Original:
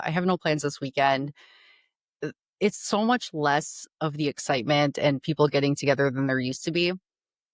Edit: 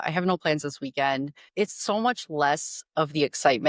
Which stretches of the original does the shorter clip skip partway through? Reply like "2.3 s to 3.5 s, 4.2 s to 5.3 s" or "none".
1.4 s to 2.4 s